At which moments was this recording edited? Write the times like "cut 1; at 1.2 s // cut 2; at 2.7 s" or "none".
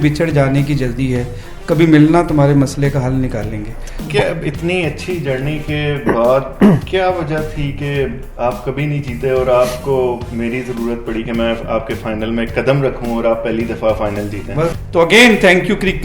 cut 1; at 4.0 s // cut 2; at 14.7 s